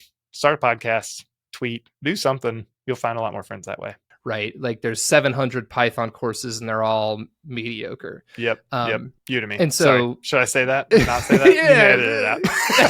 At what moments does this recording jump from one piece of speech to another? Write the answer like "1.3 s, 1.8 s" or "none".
4.0 s, 9.1 s